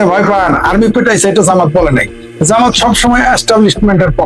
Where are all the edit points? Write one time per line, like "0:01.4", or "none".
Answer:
none